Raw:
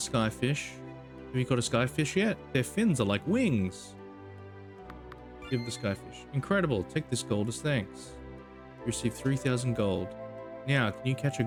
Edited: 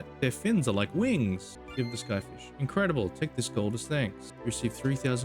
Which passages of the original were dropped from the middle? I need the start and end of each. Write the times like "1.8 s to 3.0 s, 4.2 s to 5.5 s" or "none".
3.9 s to 5.3 s, 8.0 s to 8.7 s